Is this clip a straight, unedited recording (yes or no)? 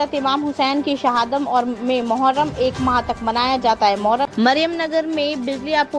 no